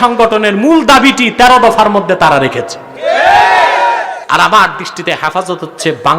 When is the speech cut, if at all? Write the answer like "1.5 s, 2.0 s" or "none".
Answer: 4.2 s